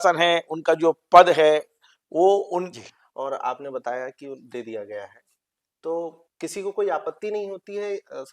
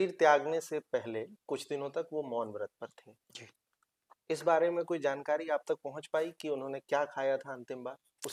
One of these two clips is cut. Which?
first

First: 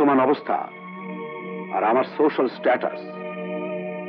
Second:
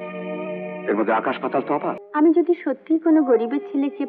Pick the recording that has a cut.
second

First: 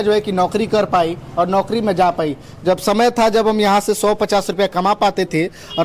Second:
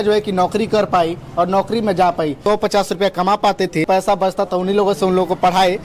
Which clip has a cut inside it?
second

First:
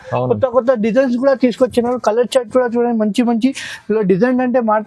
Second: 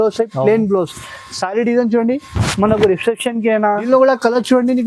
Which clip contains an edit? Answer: second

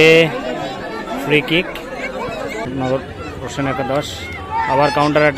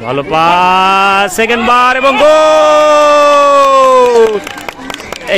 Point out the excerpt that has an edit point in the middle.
first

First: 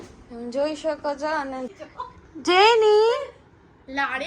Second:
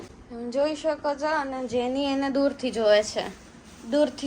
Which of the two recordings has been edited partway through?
first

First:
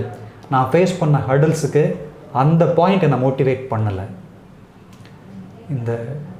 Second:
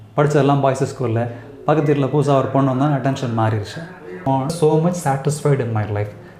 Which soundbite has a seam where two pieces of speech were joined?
second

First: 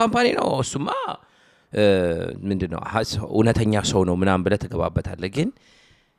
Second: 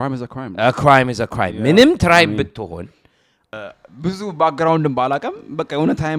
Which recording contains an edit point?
second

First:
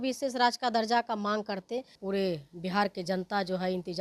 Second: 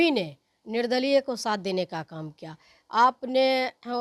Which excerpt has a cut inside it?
first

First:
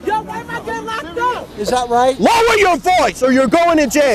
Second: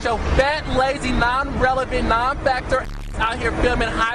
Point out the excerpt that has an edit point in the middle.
first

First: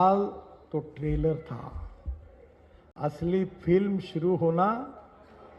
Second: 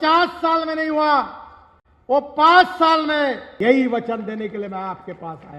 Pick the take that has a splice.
second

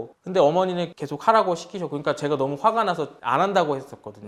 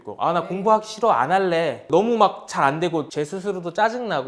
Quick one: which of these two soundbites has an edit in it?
second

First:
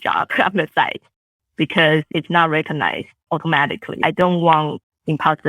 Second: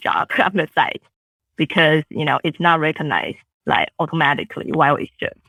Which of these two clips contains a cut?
first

